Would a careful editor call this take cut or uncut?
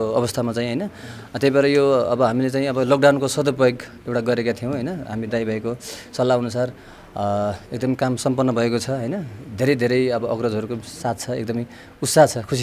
uncut